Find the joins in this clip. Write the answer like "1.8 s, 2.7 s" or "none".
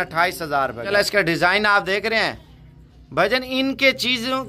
0.9 s